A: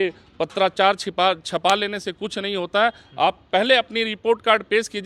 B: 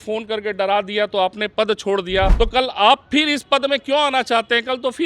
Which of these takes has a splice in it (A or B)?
B